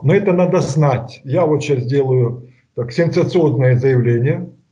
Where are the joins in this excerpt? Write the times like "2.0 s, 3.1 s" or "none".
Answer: 1.2 s